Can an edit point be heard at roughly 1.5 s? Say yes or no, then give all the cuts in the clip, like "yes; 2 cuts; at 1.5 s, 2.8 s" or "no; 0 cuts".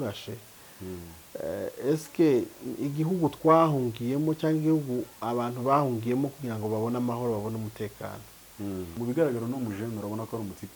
no; 1 cut; at 8.9 s